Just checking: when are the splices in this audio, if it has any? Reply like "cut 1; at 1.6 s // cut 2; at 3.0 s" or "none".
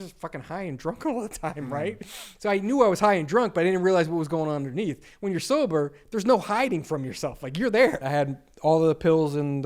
cut 1; at 8.0 s